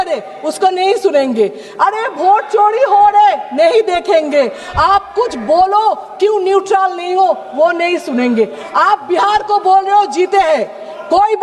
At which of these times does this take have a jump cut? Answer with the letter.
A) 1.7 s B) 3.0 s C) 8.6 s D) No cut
C